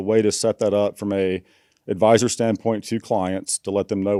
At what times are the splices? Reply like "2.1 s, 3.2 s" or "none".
none